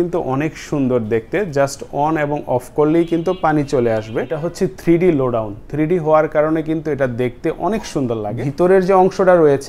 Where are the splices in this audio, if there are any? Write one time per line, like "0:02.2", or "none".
0:04.4
0:08.3